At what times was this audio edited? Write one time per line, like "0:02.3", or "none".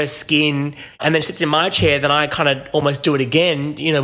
0:00.9